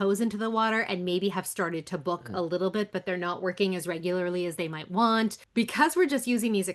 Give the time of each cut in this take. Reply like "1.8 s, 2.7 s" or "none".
5.4 s